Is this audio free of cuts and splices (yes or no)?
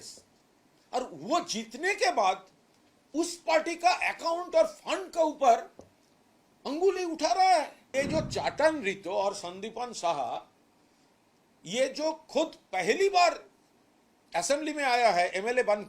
no